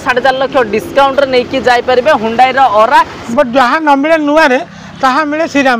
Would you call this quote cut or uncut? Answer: cut